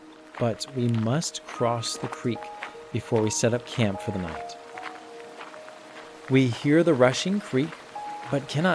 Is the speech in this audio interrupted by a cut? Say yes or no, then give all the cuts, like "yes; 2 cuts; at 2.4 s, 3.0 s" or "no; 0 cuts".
no; 0 cuts